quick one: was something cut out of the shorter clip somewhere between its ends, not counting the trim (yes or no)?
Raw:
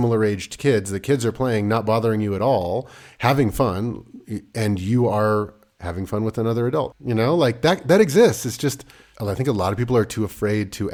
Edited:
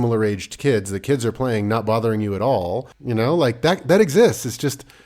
yes